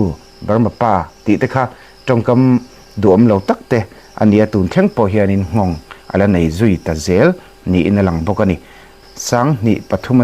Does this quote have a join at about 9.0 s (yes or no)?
yes